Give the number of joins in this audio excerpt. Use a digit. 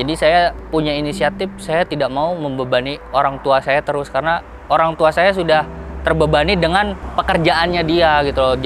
0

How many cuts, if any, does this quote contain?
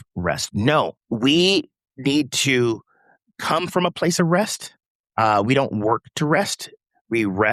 1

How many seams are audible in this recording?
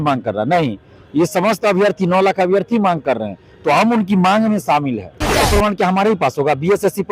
1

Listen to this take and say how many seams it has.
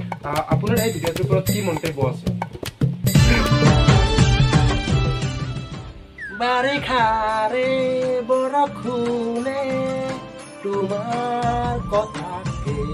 0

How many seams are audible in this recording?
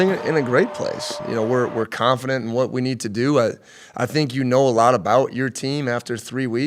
1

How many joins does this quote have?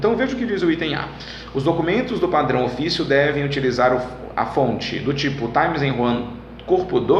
0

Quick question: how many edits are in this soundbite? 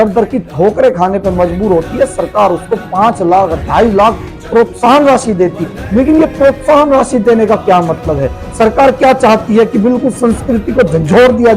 1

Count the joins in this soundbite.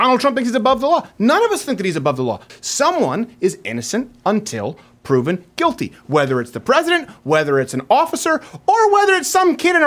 1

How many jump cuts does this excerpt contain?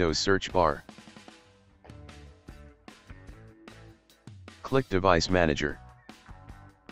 3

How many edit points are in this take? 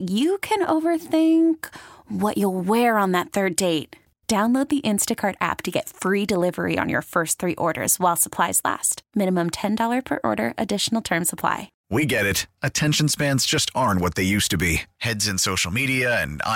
1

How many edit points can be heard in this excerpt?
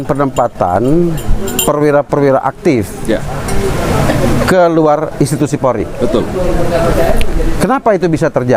0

